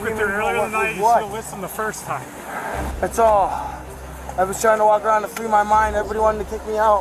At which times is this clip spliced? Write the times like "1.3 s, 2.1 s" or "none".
2.9 s